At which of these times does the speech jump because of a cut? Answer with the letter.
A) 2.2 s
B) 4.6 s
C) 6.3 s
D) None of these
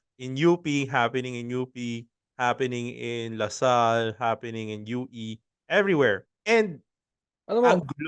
C